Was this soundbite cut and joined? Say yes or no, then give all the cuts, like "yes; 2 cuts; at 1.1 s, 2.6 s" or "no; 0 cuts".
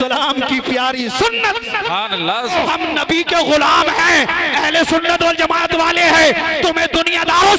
yes; 1 cut; at 2.5 s